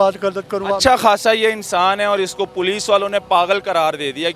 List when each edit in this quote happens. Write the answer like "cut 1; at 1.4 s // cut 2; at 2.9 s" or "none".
none